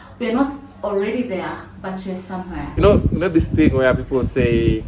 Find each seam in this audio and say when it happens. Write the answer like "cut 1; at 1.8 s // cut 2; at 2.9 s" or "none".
cut 1; at 2.8 s